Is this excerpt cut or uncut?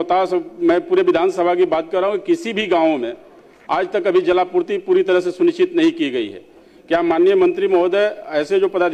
uncut